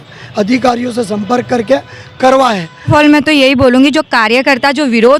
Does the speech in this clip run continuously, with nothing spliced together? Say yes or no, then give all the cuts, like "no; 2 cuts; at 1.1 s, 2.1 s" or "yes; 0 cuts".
no; 1 cut; at 2.9 s